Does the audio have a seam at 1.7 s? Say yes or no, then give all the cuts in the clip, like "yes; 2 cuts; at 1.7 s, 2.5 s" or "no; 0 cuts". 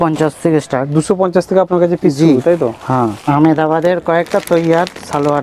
no; 1 cut; at 3.2 s